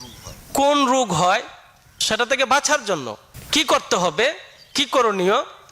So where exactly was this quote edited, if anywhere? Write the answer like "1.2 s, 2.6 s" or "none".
2.0 s, 3.0 s